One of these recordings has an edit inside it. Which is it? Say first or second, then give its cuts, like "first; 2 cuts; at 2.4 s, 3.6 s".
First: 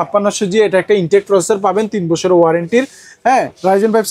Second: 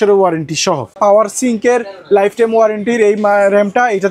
second; 1 cut; at 0.9 s